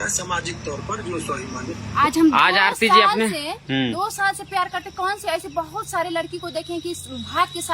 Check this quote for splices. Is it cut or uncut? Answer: cut